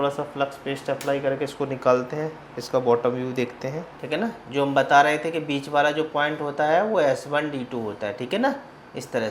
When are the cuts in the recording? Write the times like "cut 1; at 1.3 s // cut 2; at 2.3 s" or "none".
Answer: cut 1; at 3.9 s